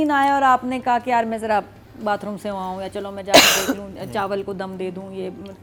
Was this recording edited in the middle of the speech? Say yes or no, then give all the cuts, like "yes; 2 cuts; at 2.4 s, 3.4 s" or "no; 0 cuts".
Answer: no; 0 cuts